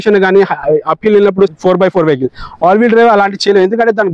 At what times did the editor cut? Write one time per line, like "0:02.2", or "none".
0:01.5

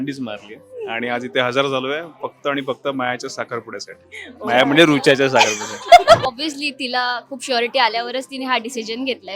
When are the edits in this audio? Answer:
0:06.2

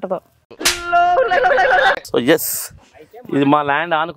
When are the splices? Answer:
0:02.0

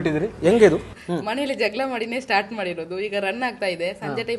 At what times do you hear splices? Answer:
0:00.9

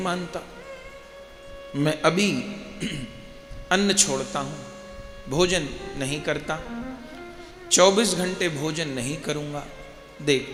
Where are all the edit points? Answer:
none

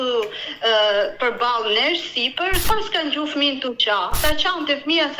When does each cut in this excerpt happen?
0:02.6
0:04.2

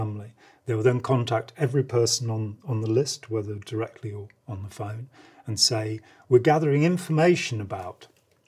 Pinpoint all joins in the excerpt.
none

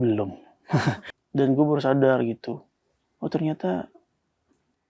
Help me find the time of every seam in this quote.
0:01.1

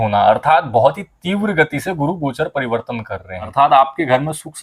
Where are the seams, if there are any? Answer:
0:03.5

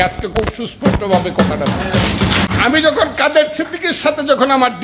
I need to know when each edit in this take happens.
0:02.5

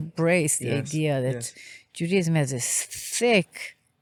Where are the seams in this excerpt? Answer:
none

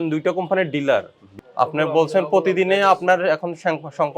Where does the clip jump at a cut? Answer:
0:01.3

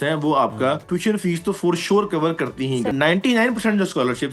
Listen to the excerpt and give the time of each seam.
0:00.8
0:02.9

